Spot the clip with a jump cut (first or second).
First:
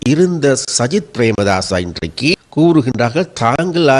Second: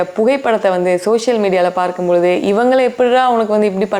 first